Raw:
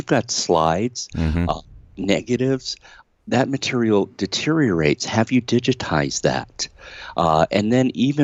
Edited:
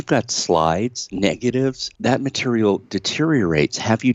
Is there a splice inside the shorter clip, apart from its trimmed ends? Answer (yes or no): yes